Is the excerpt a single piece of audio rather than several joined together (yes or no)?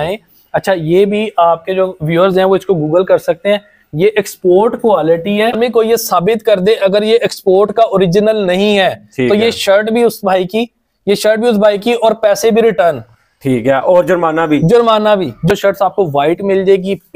no